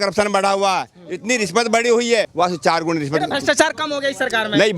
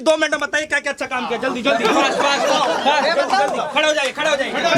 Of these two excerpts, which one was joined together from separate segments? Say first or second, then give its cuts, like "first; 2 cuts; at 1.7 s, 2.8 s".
first; 1 cut; at 2.3 s